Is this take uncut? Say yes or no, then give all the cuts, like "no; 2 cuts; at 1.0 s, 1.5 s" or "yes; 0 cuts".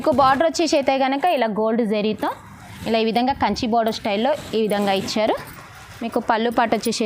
yes; 0 cuts